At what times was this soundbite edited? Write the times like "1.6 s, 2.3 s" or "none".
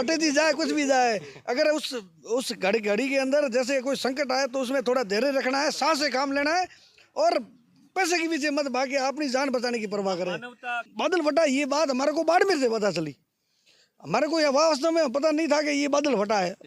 10.9 s